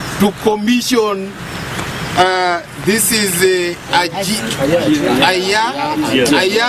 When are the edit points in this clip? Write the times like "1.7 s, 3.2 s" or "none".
none